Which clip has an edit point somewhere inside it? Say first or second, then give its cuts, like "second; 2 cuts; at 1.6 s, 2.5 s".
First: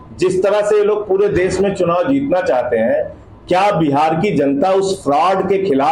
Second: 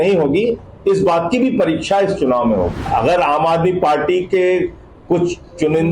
second; 1 cut; at 2.8 s